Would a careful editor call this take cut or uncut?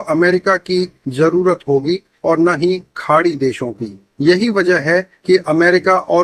uncut